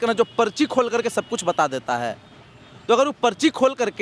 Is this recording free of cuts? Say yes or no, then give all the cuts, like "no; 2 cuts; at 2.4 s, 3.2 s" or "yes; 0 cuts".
yes; 0 cuts